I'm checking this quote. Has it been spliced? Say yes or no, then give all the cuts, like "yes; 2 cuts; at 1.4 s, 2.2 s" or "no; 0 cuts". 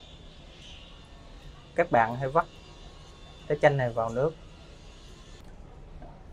yes; 1 cut; at 5.4 s